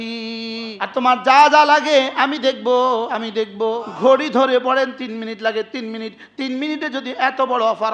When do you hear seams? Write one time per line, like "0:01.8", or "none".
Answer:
0:01.0
0:03.7